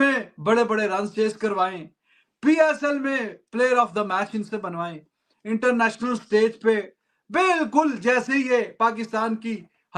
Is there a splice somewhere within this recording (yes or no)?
no